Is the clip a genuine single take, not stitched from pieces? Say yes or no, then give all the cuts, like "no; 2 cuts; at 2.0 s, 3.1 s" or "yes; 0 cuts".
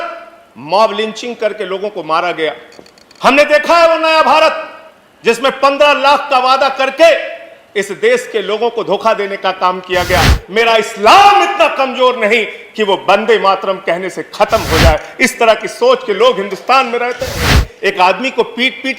no; 2 cuts; at 10.4 s, 17.7 s